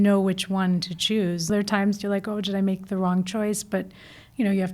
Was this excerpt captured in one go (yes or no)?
no